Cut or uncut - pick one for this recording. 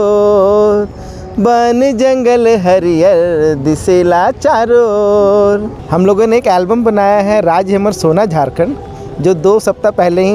cut